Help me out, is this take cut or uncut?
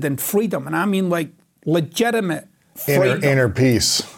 uncut